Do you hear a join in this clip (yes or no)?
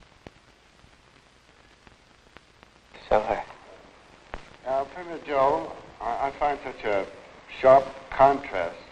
no